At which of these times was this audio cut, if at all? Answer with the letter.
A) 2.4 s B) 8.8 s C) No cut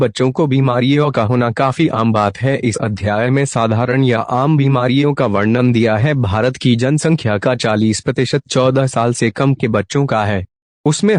A